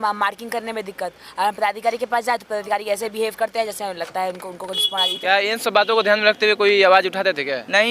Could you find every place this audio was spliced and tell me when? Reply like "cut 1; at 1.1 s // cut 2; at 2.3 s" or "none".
cut 1; at 5.2 s